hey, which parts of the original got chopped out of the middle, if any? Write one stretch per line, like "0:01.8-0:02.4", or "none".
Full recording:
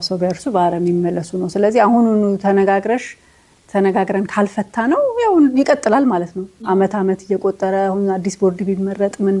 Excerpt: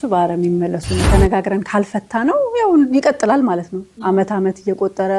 0:01.4-0:03.6